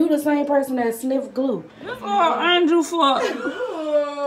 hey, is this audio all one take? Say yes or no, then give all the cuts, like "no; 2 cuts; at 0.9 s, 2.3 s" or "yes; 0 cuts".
no; 1 cut; at 2.0 s